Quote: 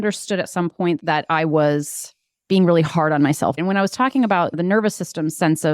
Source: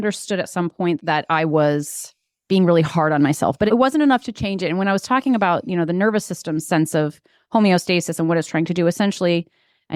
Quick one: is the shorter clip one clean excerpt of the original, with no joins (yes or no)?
no